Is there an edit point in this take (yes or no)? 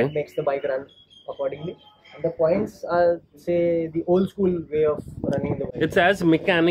no